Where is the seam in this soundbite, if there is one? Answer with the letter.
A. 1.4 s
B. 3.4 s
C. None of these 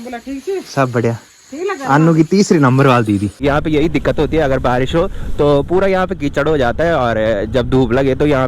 B